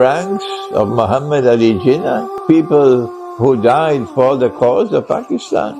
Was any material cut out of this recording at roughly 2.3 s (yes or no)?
yes